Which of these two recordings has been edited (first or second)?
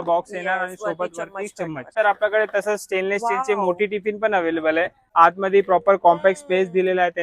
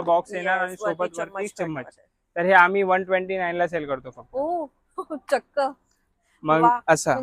first